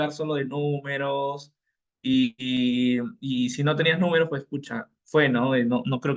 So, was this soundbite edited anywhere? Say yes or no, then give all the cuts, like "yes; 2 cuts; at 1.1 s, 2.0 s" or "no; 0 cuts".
no; 0 cuts